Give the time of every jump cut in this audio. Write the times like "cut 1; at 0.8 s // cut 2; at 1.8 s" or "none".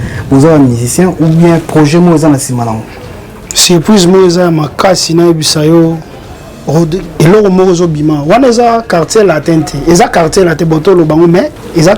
cut 1; at 6.9 s

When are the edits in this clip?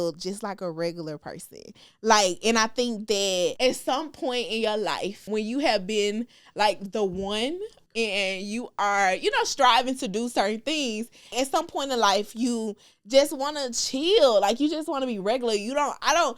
cut 1; at 3.6 s // cut 2; at 5.3 s // cut 3; at 7.7 s // cut 4; at 11.3 s

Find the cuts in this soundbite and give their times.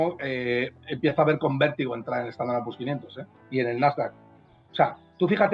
none

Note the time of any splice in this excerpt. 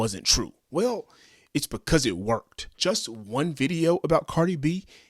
cut 1; at 2.8 s

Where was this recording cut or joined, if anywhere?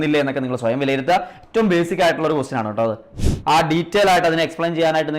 cut 1; at 3.1 s

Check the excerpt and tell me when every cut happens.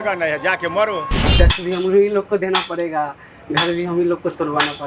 cut 1; at 1.2 s

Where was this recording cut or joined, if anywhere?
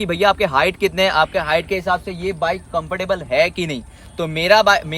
none

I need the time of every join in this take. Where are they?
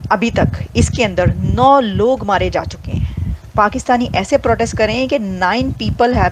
none

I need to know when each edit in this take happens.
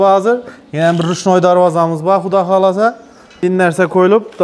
cut 1; at 3.4 s

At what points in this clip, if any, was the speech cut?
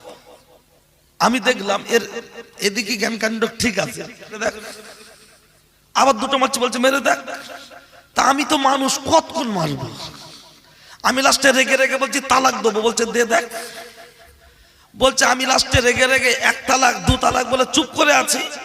cut 1; at 4.4 s

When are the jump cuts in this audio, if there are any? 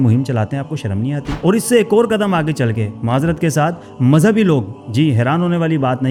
none

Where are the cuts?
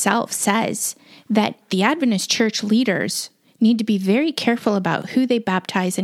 cut 1; at 1.6 s

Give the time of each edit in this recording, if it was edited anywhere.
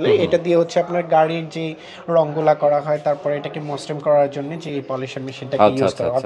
none

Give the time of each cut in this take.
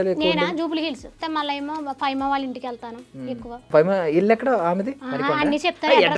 cut 1; at 1.2 s // cut 2; at 3.7 s // cut 3; at 5.0 s

